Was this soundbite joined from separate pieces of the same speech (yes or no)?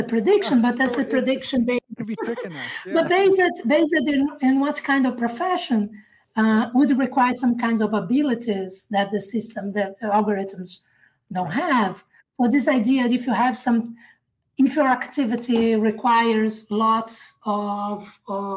no